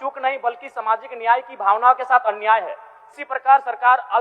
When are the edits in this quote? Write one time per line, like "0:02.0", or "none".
0:02.9